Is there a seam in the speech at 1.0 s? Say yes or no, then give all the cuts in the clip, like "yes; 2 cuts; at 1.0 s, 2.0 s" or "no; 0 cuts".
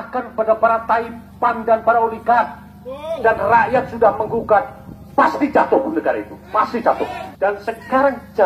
no; 2 cuts; at 3.1 s, 7.2 s